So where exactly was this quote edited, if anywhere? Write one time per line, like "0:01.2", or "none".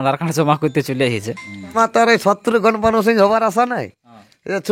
0:01.7